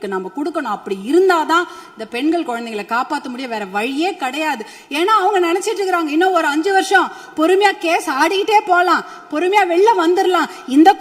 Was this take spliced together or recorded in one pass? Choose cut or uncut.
uncut